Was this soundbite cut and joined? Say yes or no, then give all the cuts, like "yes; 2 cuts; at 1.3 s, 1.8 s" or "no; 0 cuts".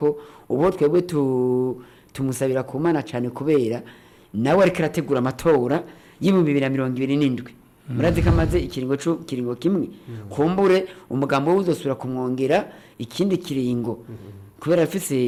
no; 0 cuts